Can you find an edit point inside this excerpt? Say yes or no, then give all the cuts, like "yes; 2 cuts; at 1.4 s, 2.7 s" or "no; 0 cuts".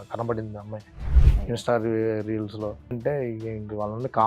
yes; 1 cut; at 3.0 s